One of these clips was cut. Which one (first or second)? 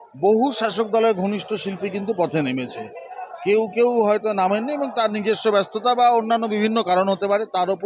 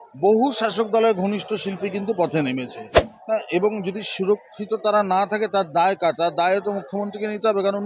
second